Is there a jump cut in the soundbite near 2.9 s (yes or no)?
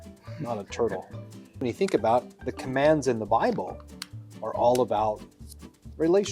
no